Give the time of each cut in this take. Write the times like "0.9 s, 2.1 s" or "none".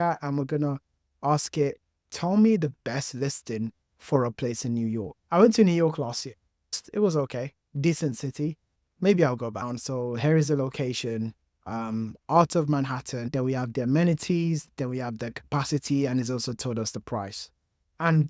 5.1 s, 6.8 s, 9.7 s